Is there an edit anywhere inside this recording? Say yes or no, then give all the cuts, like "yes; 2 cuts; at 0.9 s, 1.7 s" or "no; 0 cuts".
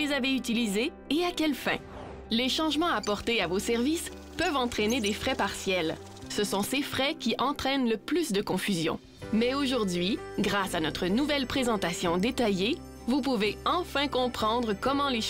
no; 0 cuts